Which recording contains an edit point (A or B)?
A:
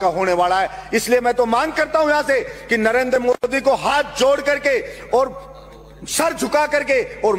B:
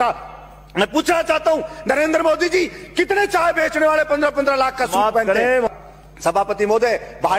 B